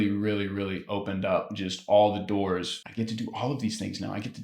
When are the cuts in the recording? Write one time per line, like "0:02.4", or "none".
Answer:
0:02.8